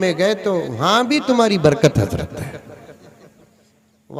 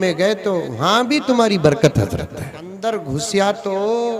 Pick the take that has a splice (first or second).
second